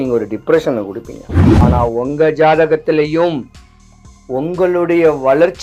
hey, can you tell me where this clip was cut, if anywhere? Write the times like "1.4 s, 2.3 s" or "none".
1.4 s